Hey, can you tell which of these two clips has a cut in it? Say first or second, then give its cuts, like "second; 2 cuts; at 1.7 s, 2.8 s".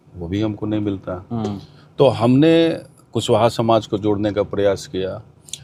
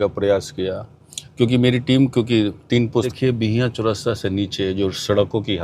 second; 1 cut; at 3.1 s